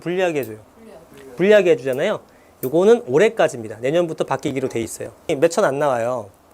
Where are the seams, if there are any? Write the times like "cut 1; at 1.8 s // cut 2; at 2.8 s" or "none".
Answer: cut 1; at 5.3 s